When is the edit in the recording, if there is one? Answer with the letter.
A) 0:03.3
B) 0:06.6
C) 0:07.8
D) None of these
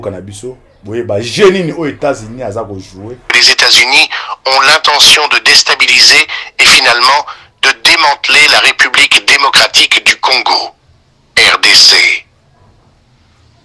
A